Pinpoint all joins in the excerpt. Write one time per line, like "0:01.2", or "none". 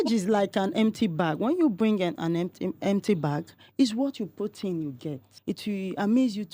0:05.3